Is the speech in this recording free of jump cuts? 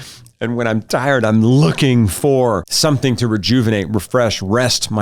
no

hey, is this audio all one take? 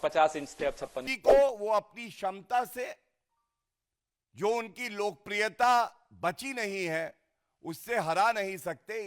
no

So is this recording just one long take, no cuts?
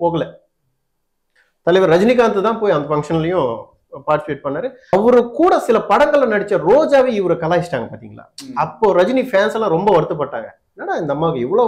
no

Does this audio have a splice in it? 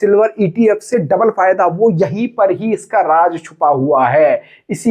no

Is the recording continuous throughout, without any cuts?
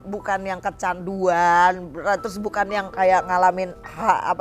yes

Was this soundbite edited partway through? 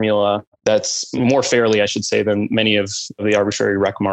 yes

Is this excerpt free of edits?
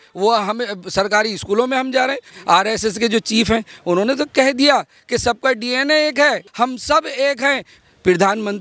no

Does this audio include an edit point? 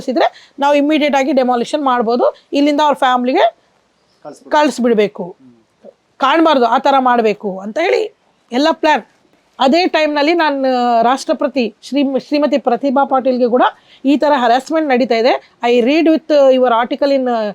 yes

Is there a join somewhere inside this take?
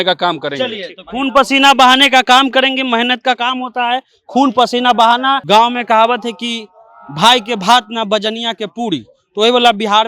yes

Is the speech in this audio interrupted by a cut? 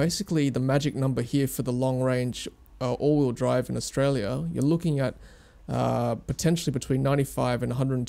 no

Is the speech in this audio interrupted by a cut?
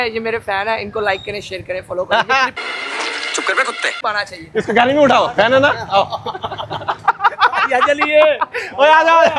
no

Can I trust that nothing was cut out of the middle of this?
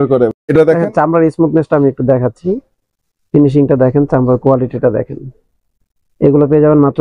yes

